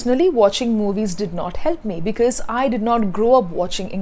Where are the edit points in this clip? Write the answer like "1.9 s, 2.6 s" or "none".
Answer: none